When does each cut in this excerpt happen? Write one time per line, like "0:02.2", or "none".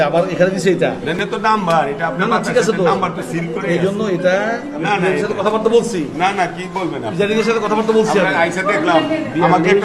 0:01.2